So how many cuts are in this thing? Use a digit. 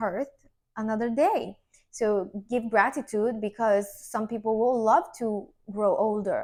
0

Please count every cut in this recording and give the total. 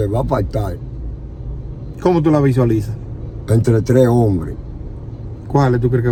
0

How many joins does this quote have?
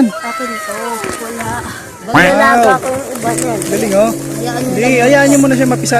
0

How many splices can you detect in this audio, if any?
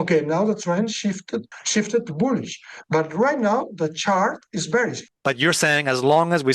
2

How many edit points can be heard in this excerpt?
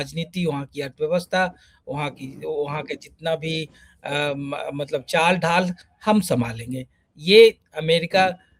0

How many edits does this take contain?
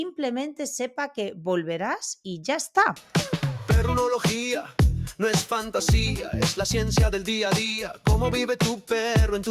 1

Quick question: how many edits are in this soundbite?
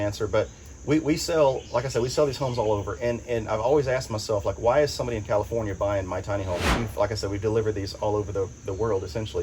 1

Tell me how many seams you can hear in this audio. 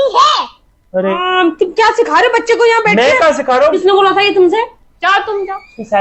3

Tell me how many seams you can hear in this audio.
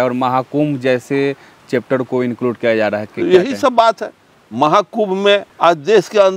0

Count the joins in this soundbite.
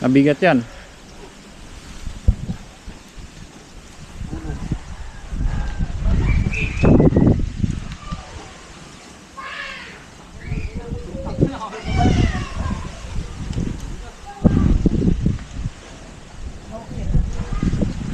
0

